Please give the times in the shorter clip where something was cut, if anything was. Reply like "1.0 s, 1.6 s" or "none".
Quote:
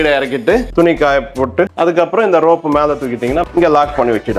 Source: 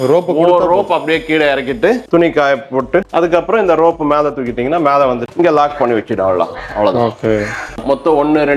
3.4 s